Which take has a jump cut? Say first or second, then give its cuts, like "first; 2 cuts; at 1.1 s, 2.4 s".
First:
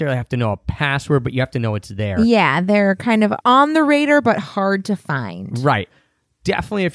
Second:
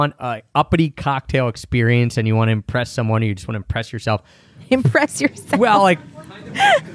first; 2 cuts; at 3.4 s, 5.9 s